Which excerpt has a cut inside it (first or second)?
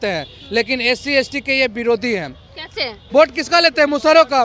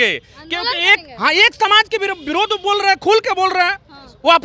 first